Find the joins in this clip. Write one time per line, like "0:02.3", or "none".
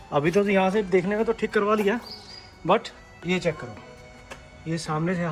none